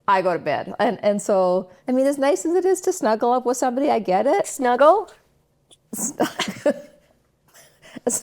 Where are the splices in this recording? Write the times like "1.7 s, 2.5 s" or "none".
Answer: 1.7 s